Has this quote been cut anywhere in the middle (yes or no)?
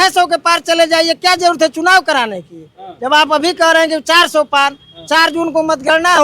no